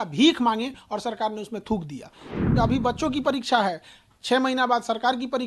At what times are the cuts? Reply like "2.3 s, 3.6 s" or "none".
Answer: 2.4 s

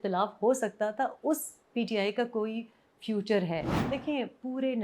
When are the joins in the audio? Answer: 3.6 s

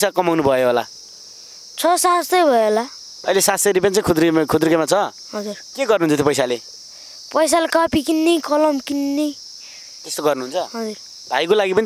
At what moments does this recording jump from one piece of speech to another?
none

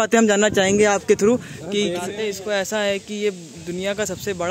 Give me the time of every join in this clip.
2.2 s

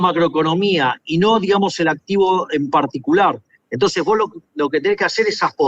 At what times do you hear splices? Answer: none

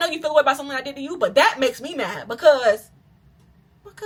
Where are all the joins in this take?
none

